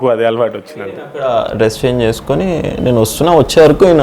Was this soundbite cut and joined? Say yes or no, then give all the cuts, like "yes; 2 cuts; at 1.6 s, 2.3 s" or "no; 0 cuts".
yes; 1 cut; at 1.2 s